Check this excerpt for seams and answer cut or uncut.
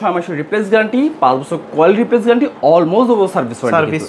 uncut